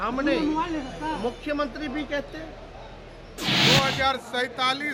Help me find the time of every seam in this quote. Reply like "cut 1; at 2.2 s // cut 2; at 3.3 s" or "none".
cut 1; at 3.4 s